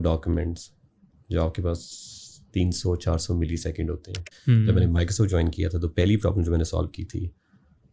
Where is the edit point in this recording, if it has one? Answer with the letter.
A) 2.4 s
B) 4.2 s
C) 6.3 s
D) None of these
B